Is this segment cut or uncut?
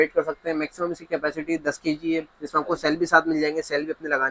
uncut